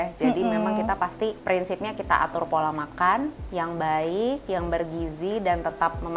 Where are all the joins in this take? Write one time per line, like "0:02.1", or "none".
0:01.4